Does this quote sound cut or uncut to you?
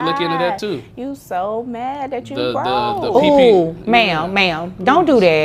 uncut